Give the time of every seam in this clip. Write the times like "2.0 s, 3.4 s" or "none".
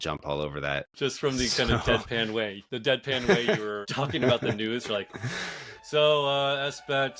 0.9 s, 2.6 s, 3.8 s